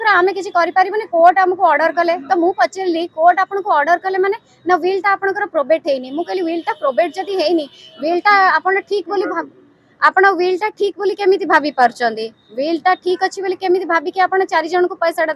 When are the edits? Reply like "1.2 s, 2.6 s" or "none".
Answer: none